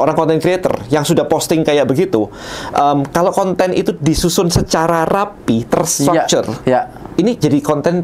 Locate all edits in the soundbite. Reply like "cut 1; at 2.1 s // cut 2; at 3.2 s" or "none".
none